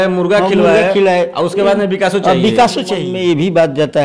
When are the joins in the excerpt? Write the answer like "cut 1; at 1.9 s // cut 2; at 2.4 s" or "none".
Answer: cut 1; at 3.0 s